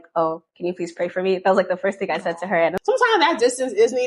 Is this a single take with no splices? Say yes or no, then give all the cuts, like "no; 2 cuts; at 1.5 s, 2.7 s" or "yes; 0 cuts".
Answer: no; 1 cut; at 2.8 s